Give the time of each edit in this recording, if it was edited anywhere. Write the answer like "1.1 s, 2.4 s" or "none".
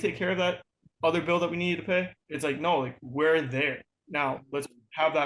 2.2 s